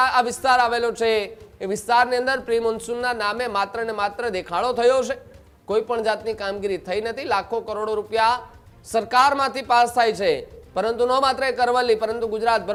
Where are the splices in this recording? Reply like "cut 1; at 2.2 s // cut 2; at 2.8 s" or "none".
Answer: none